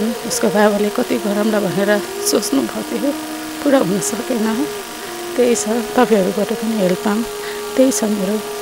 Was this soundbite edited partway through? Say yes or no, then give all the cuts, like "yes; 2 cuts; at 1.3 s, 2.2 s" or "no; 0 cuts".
no; 0 cuts